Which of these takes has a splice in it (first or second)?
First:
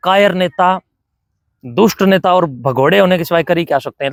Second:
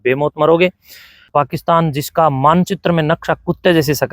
second